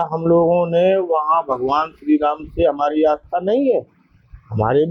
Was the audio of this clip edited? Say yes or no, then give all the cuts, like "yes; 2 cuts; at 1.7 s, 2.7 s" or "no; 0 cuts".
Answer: no; 0 cuts